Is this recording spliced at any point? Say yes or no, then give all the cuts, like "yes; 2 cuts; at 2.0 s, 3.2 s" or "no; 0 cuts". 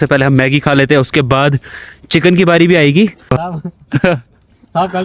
yes; 1 cut; at 3.4 s